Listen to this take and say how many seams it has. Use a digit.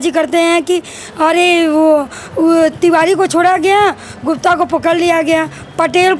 0